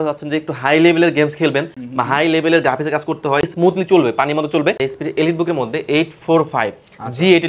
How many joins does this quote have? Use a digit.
2